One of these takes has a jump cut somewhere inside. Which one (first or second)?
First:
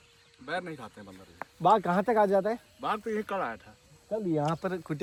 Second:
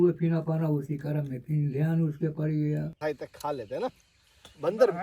second